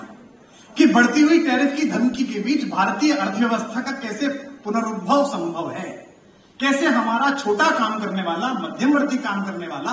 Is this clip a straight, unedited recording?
yes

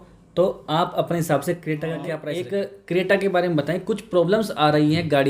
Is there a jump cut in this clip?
yes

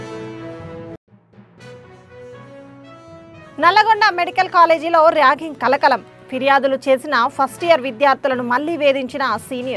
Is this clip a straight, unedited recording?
yes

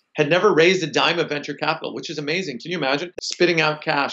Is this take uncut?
no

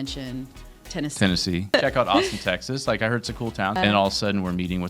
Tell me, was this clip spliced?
yes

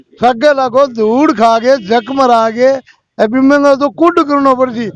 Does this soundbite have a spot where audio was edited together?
no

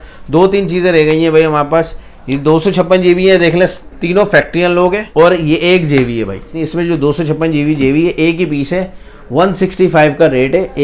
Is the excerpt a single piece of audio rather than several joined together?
no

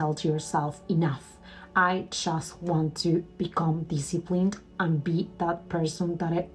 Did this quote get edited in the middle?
no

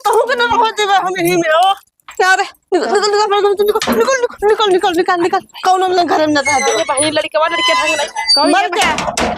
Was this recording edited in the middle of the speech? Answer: yes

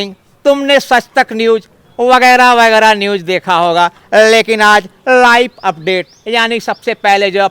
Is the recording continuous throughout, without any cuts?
yes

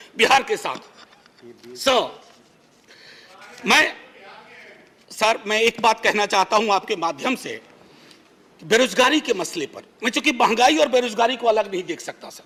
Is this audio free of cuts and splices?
yes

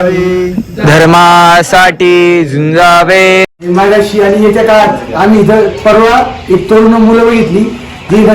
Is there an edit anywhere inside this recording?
yes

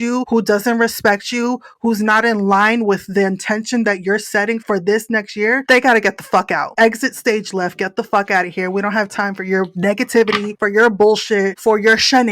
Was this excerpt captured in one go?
no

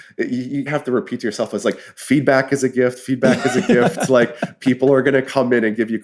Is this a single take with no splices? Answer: yes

